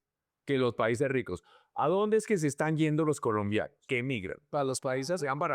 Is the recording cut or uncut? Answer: cut